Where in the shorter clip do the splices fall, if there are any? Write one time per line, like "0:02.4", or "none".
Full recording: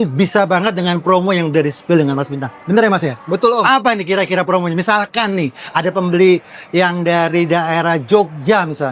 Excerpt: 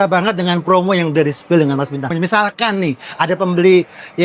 0:02.1